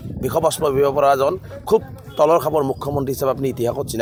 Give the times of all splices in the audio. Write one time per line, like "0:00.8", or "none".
none